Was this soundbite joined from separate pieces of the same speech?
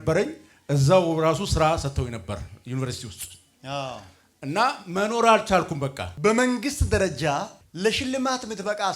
yes; 1 cut; at 6.0 s

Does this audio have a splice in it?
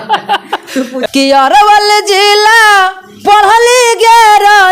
yes; 1 cut; at 1.0 s

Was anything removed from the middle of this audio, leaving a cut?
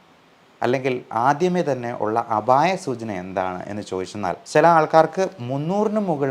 yes; 1 cut; at 4.4 s

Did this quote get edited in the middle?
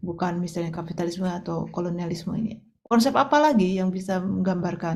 no; 0 cuts

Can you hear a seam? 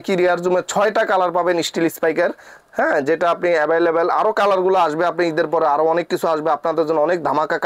no; 0 cuts

